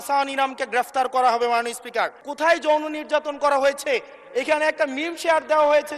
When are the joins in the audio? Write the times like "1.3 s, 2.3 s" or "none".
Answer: 2.2 s